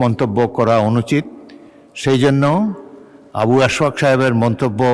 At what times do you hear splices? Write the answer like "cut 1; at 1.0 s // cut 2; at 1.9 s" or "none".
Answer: none